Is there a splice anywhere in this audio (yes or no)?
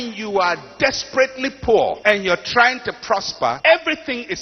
yes